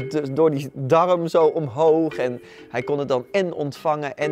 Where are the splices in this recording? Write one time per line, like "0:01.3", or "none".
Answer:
none